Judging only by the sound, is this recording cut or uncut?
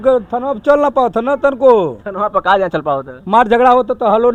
uncut